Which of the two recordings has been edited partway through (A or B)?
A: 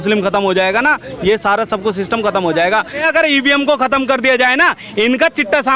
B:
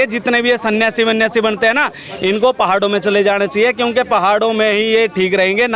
A